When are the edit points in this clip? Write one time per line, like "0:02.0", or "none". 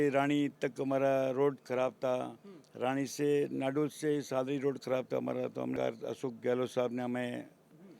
0:05.7